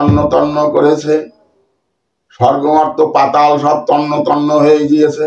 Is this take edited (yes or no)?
no